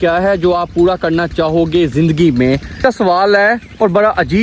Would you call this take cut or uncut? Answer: cut